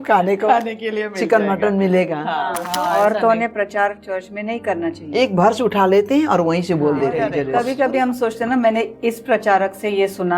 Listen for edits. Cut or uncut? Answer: cut